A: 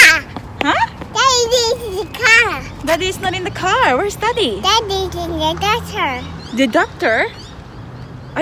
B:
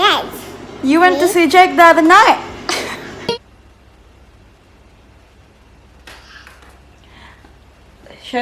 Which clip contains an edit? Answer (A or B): B